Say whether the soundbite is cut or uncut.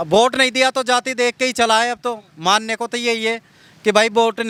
uncut